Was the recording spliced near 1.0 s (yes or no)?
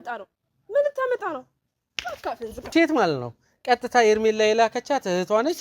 no